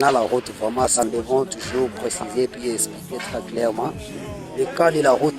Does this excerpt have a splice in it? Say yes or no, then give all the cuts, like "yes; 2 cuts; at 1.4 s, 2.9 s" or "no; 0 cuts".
yes; 1 cut; at 1.0 s